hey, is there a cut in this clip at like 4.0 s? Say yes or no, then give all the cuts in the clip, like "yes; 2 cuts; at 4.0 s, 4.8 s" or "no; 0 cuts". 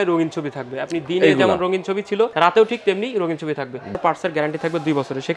yes; 2 cuts; at 2.3 s, 4.0 s